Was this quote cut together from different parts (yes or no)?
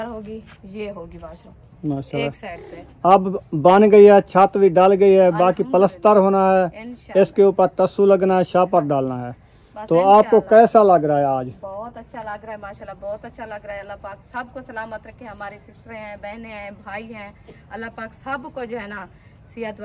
no